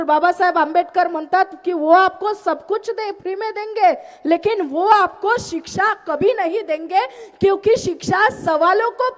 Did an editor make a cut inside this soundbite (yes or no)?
no